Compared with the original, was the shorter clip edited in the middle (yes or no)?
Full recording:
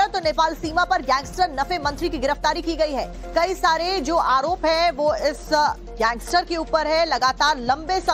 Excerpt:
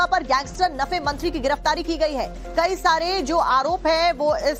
no